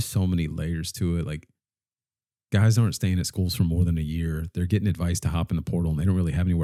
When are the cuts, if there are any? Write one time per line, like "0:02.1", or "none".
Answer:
none